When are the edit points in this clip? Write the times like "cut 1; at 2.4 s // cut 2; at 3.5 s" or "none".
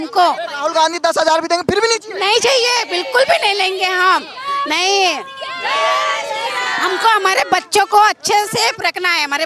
none